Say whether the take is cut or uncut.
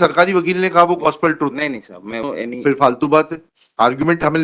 cut